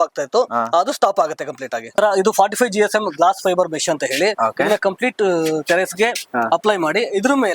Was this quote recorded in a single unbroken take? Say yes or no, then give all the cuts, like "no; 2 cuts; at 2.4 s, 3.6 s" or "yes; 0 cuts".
no; 1 cut; at 1.9 s